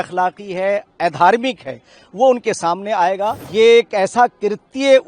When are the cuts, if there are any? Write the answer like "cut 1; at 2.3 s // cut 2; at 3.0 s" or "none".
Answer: cut 1; at 3.4 s